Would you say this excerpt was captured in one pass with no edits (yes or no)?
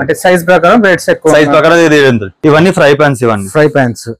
no